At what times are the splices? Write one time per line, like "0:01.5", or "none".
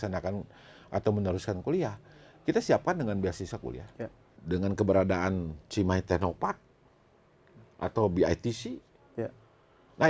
0:04.3